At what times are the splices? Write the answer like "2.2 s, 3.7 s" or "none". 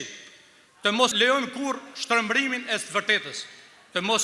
1.1 s